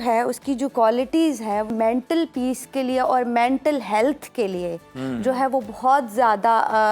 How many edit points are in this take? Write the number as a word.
one